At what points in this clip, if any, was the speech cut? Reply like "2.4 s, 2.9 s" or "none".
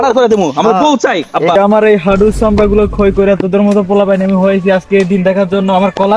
1.6 s

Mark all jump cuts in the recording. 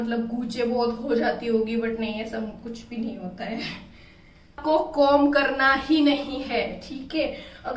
4.6 s

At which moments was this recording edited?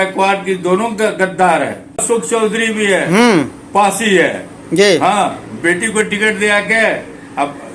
2.0 s

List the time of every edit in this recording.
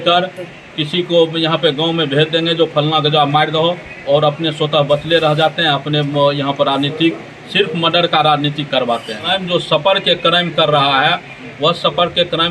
9.3 s

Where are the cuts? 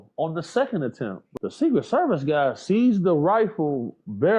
1.2 s

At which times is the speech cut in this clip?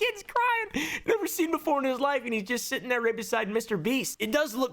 1.0 s

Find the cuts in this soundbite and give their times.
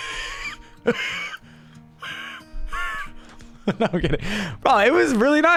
none

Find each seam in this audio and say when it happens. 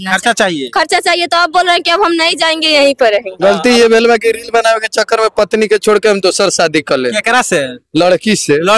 3.3 s

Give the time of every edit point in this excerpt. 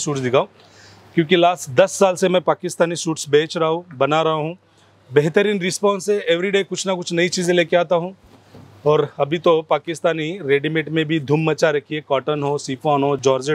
none

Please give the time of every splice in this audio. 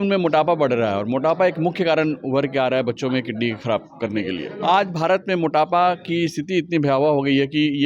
4.5 s

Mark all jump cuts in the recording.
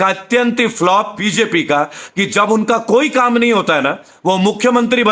1.2 s

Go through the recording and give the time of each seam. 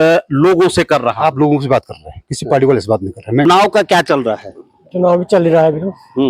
3.4 s

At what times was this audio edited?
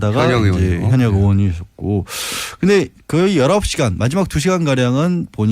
3.0 s

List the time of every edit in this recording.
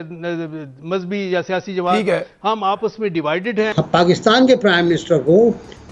3.8 s

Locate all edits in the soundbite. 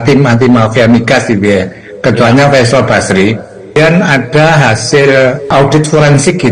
3.7 s, 5.5 s

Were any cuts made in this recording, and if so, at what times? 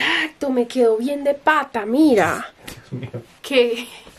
none

